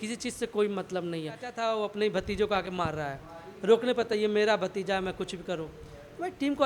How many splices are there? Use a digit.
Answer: 1